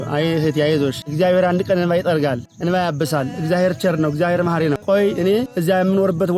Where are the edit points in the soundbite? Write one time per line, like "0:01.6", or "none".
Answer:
0:01.0
0:02.5
0:04.8
0:05.5